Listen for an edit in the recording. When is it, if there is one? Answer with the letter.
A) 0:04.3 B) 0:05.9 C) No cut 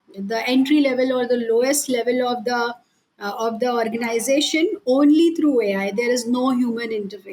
C